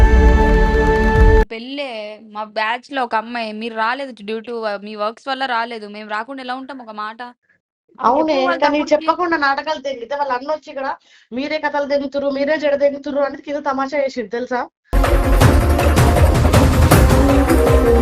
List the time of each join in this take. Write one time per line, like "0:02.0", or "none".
0:01.5